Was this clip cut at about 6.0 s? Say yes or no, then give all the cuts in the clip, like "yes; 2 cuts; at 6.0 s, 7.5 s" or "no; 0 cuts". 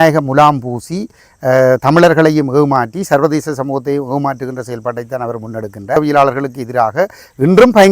yes; 1 cut; at 6.0 s